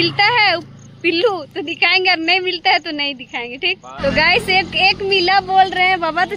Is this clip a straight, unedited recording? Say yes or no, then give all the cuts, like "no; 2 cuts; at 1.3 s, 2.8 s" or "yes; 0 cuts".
yes; 0 cuts